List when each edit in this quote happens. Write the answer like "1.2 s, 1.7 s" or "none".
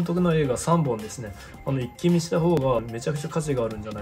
2.6 s